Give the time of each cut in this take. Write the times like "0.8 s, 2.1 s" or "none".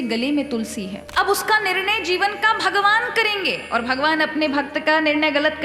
1.0 s